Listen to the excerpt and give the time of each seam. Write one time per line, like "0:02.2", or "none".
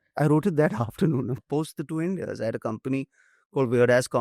0:01.4